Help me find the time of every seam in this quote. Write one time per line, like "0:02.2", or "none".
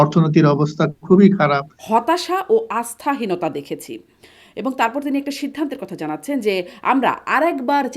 0:01.7